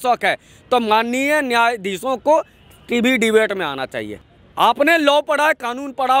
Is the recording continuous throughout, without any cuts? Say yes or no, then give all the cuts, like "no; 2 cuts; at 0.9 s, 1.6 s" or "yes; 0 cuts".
no; 1 cut; at 4.2 s